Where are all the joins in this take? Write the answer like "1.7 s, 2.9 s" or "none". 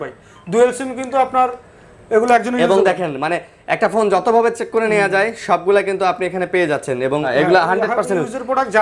7.3 s